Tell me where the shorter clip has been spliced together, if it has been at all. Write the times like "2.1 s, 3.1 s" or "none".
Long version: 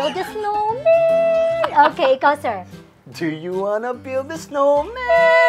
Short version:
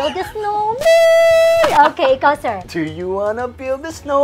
2.6 s